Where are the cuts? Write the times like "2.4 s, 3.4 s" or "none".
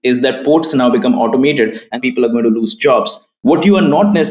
1.9 s, 3.2 s